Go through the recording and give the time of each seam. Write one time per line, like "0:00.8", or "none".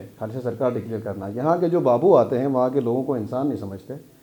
none